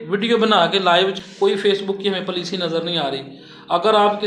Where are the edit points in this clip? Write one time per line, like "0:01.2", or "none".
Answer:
0:01.2